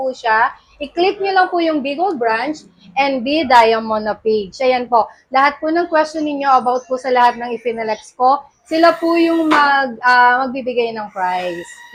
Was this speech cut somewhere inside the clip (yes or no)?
no